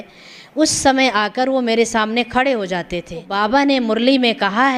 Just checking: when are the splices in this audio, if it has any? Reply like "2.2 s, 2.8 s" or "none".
3.3 s